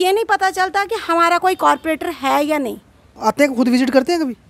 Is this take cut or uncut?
uncut